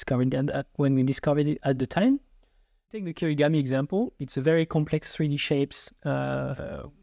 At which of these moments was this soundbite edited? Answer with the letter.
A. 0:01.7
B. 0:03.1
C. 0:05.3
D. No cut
B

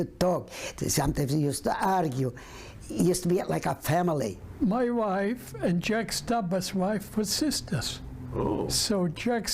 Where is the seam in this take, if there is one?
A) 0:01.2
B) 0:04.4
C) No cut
B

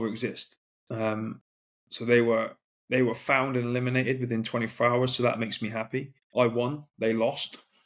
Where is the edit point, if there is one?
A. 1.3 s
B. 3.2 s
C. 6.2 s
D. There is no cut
C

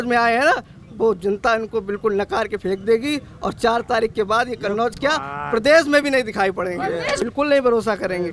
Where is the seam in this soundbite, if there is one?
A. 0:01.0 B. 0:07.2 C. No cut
B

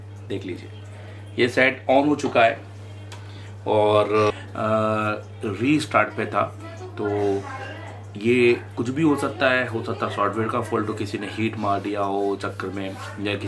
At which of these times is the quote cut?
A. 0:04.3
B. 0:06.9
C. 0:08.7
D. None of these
A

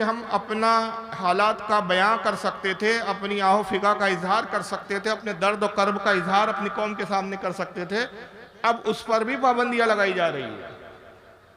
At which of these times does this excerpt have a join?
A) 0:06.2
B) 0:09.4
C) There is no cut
C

